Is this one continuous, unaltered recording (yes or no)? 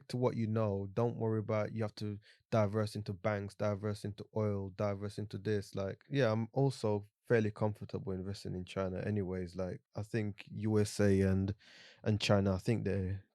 no